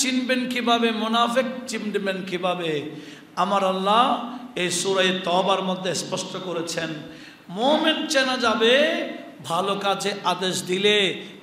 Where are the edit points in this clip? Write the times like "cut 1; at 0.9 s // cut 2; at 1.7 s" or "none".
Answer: none